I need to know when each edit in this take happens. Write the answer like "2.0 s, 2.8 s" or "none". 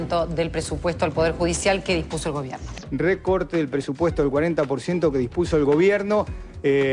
none